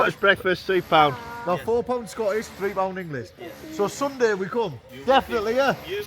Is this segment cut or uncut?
cut